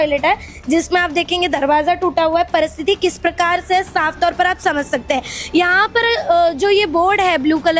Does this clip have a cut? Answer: no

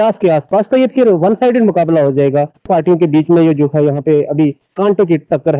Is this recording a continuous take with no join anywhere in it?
no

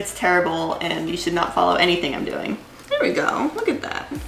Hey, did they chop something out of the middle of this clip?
no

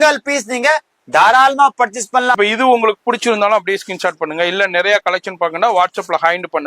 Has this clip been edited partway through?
yes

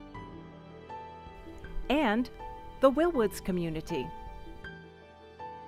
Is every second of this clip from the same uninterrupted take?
yes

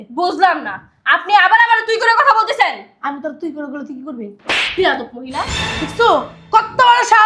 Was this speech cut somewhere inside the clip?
no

